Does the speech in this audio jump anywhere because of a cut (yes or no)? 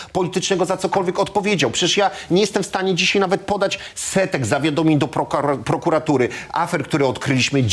no